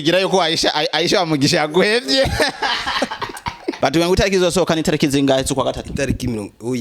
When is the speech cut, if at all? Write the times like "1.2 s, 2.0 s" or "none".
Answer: 3.7 s